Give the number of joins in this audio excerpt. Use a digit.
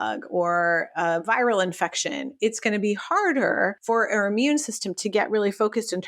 1